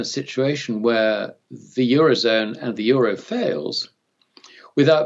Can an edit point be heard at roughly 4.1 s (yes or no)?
no